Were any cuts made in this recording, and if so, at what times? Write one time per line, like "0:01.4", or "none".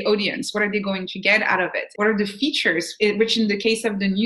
0:01.9